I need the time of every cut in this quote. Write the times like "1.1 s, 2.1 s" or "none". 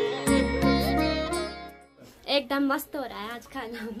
2.1 s